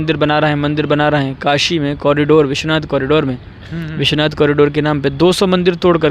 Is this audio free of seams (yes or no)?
yes